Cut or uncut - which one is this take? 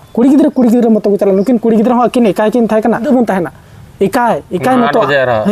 cut